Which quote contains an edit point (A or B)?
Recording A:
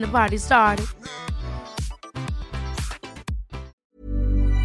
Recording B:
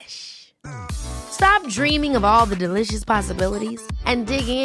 A